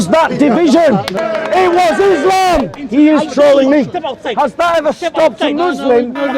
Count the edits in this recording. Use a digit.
2